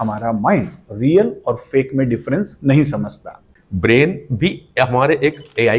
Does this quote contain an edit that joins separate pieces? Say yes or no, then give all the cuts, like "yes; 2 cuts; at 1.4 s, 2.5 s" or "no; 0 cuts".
yes; 1 cut; at 3.4 s